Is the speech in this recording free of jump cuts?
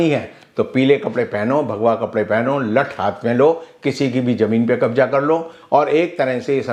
yes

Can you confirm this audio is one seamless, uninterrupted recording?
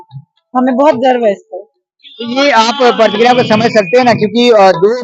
yes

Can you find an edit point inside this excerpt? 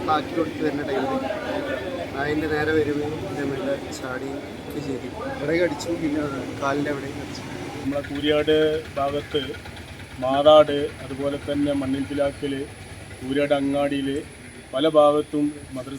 yes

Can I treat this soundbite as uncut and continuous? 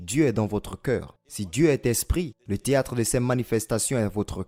yes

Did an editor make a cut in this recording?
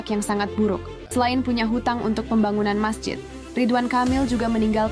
yes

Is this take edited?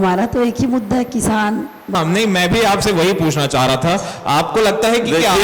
yes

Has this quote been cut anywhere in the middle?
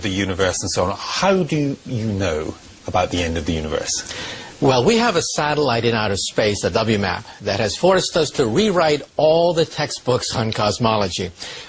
yes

